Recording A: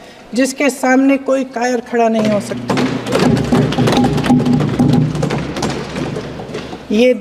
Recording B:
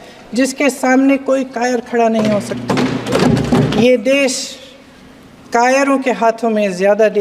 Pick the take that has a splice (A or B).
B